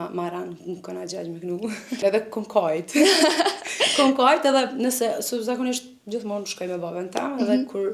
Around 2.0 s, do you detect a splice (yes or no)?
yes